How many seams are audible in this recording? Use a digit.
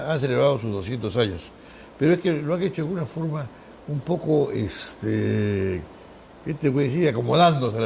1